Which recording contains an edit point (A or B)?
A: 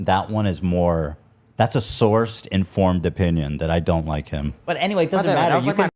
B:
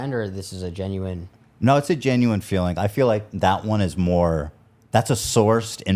A